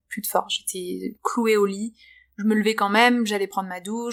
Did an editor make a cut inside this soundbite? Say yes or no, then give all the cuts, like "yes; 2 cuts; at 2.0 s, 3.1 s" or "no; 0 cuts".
no; 0 cuts